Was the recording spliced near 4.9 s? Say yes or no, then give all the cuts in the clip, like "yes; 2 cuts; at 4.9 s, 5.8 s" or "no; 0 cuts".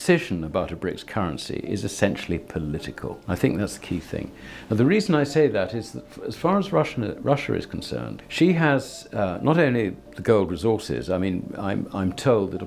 no; 2 cuts; at 3.1 s, 8.2 s